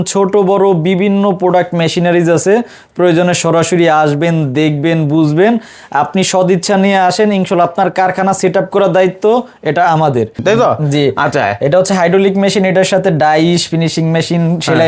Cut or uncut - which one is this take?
cut